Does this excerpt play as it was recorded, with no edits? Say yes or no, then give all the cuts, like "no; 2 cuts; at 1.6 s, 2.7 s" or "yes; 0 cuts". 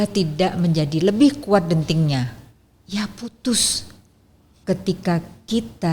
no; 1 cut; at 4.5 s